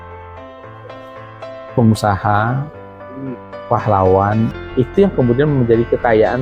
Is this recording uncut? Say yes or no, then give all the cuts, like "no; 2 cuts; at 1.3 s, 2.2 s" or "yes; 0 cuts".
no; 1 cut; at 4.5 s